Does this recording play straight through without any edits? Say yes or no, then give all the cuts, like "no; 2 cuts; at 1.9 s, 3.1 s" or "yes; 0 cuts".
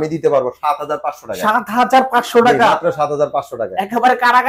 yes; 0 cuts